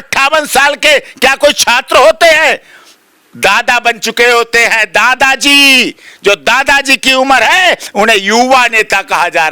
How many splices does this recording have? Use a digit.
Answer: 0